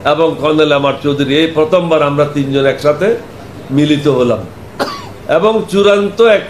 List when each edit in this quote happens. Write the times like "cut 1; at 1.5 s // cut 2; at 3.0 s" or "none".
none